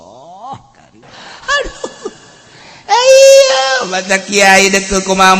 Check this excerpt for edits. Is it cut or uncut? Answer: cut